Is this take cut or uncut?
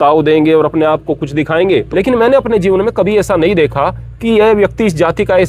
cut